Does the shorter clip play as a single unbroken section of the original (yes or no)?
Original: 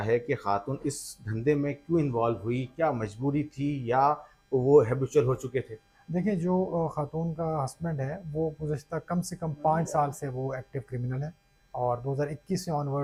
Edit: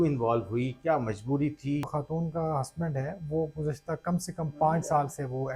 no